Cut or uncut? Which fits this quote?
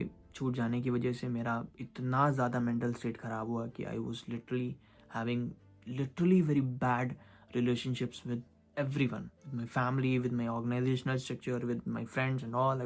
uncut